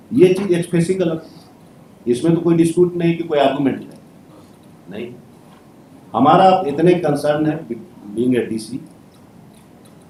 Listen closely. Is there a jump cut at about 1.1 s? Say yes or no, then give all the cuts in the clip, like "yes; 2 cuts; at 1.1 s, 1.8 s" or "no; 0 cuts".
no; 0 cuts